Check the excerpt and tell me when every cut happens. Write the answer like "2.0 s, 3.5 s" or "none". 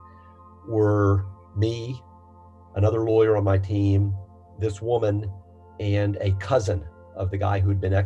none

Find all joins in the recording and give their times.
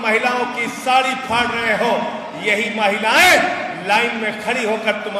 none

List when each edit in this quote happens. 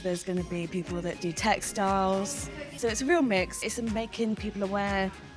2.8 s, 3.6 s

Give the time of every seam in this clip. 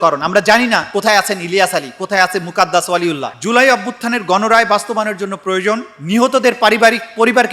3.2 s, 5.9 s

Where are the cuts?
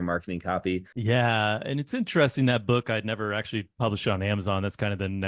0.9 s

